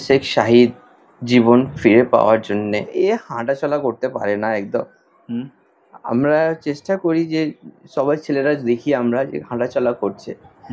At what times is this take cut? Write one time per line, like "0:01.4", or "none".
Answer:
0:02.9